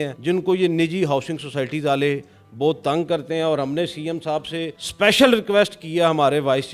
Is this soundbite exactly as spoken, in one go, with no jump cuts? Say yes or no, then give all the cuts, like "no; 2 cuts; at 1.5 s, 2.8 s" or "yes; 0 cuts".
yes; 0 cuts